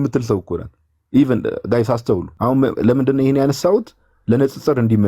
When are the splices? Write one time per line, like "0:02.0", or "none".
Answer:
0:02.3